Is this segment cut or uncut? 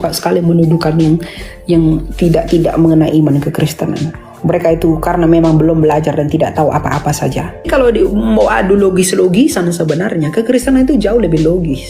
cut